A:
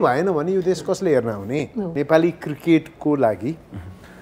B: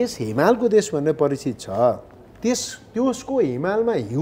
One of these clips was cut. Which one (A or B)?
A